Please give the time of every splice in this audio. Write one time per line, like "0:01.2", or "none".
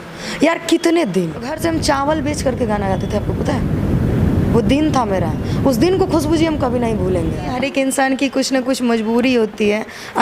0:01.6
0:07.5